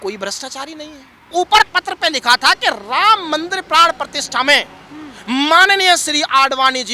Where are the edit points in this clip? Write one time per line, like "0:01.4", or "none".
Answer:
0:01.3